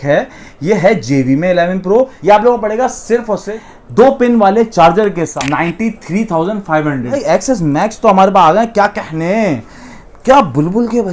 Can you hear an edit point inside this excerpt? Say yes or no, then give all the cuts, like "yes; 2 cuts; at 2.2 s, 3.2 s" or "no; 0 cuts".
yes; 4 cuts; at 2.1 s, 3.6 s, 5.3 s, 7.2 s